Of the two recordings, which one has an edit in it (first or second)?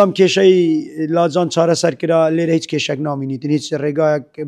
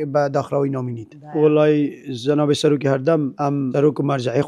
second